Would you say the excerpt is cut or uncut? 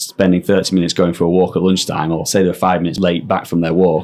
cut